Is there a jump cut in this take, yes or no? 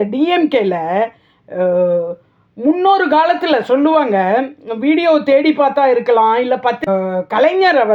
yes